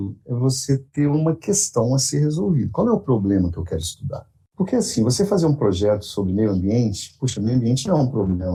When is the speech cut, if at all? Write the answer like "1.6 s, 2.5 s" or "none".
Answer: none